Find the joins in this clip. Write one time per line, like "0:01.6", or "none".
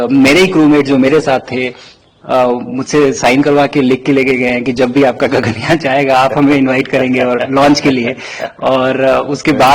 none